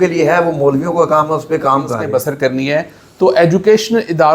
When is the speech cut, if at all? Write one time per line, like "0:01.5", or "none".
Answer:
0:02.0